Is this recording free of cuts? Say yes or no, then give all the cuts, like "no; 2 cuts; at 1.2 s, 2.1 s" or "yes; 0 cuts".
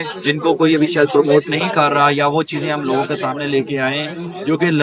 yes; 0 cuts